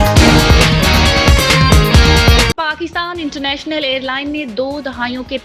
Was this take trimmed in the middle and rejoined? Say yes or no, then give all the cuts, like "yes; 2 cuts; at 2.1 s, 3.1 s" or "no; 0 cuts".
yes; 1 cut; at 2.5 s